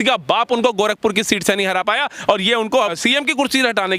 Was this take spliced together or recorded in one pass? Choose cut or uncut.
cut